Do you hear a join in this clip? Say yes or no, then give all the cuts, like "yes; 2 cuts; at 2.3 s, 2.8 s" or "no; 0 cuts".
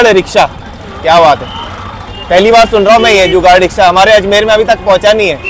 no; 0 cuts